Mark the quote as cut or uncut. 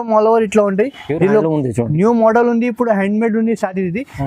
uncut